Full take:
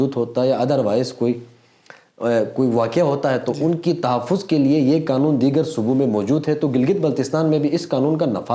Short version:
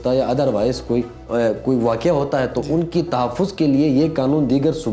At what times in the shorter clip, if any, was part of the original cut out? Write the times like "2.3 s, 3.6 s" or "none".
1.2 s